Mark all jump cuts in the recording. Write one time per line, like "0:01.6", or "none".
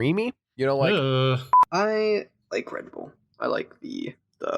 0:01.5